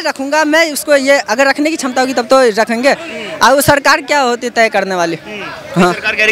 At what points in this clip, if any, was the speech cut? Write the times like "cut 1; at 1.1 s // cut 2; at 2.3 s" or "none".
none